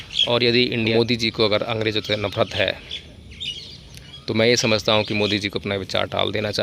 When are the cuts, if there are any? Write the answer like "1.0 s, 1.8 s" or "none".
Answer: 0.9 s